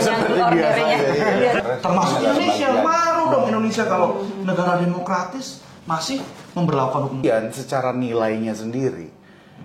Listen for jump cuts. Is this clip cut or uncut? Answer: cut